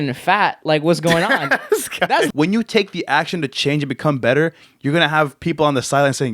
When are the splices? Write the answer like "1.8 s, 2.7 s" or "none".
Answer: 2.3 s